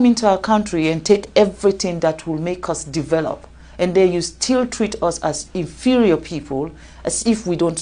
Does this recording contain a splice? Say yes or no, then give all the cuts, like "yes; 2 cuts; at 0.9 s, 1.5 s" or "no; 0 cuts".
no; 0 cuts